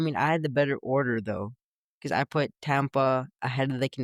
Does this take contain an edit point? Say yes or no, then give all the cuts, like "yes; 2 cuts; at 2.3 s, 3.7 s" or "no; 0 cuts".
no; 0 cuts